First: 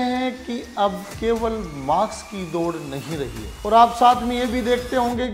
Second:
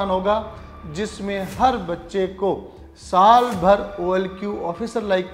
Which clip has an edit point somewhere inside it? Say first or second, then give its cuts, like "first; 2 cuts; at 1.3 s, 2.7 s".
first; 2 cuts; at 1.1 s, 3.4 s